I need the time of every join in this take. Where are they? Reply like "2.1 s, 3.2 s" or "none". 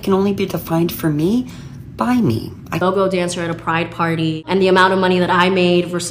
2.8 s